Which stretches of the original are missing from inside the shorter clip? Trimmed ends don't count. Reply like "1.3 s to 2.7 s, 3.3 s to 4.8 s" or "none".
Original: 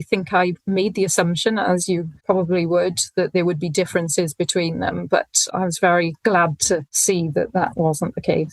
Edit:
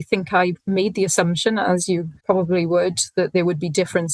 none

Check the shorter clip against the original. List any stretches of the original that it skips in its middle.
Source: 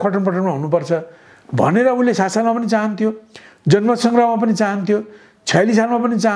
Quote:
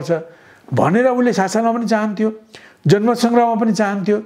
none

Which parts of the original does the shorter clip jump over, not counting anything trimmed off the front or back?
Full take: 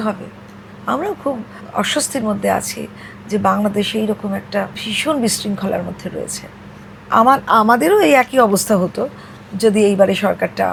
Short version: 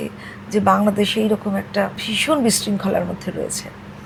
none

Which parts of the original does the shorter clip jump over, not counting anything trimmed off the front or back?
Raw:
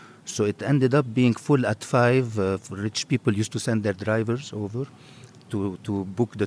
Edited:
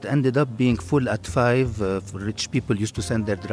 none

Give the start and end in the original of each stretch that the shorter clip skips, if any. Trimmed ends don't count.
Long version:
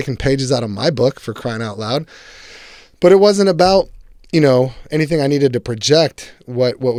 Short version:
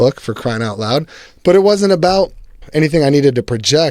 2.2 s to 2.8 s, 4.2 s to 4.8 s

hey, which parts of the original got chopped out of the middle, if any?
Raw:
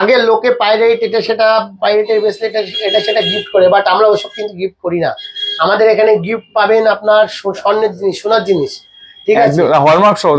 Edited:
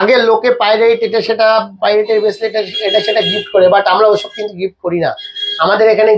none

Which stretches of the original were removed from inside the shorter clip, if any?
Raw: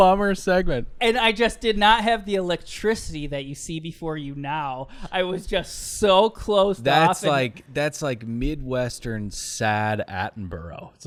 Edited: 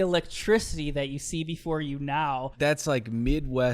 4.8 s to 7.6 s

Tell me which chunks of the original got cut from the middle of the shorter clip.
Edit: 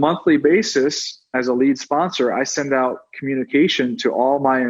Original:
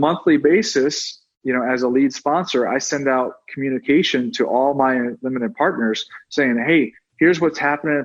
1.3 s to 1.7 s

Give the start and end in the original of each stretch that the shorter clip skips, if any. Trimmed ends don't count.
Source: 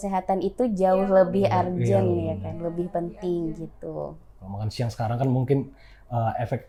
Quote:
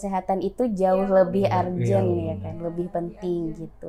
none

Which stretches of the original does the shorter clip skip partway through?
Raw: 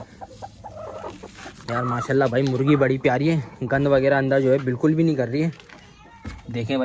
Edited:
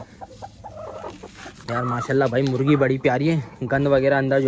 none

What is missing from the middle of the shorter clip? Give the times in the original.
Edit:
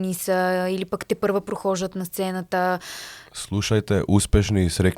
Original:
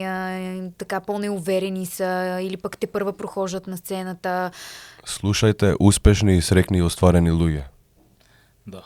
none

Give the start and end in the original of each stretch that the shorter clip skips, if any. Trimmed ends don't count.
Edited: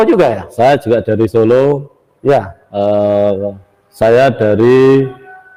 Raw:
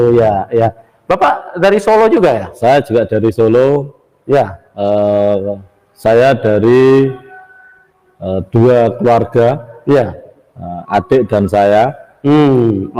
none

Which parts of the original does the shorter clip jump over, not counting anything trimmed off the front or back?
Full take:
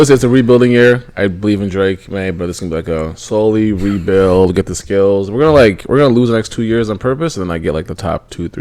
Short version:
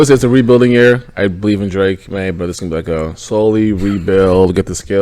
none

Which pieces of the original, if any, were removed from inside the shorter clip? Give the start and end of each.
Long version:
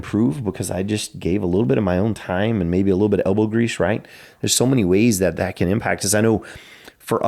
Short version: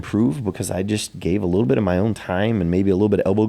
none

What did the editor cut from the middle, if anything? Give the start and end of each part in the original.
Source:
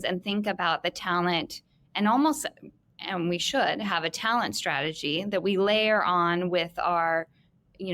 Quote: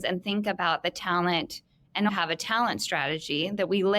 2.1 s to 3.8 s

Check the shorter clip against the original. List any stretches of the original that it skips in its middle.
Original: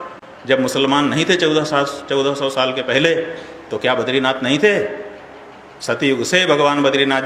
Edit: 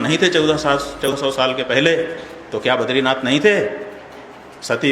2.2 s to 2.3 s

